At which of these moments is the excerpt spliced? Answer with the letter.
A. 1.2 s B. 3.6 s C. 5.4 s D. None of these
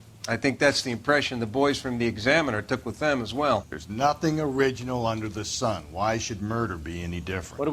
D